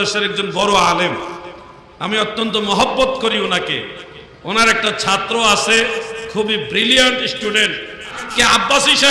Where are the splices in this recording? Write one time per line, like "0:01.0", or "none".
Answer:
0:08.2